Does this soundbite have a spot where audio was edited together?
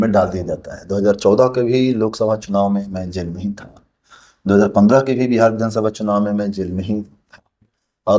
no; 0 cuts

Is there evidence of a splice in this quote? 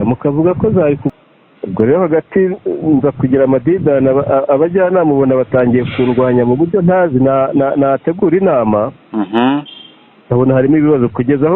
yes; 1 cut; at 1.1 s

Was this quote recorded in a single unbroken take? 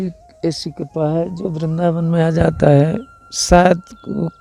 yes; 0 cuts

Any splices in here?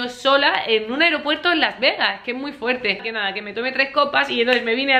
no; 0 cuts

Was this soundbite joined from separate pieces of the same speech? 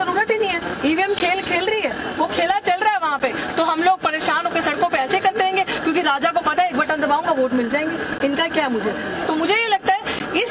no; 0 cuts

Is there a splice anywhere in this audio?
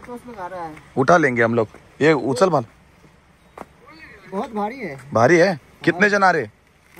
no; 0 cuts

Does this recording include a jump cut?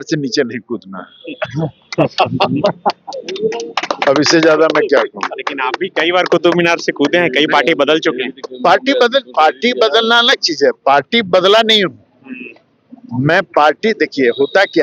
no; 0 cuts

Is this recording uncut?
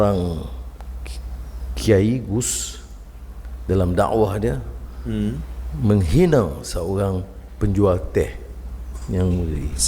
yes; 0 cuts

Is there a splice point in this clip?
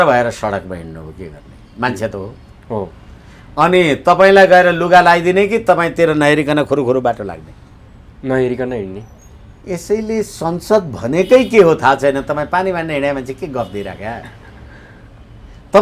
no; 0 cuts

